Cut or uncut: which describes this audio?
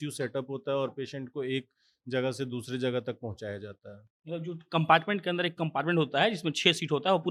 uncut